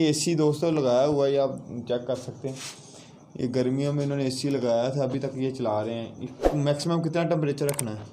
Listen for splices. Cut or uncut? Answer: uncut